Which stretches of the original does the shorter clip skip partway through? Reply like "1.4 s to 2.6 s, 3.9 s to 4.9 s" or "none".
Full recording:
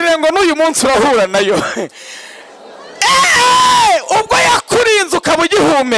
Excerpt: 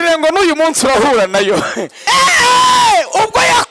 1.9 s to 2.8 s